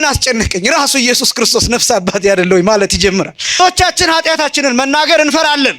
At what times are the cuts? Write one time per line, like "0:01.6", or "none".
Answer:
0:03.6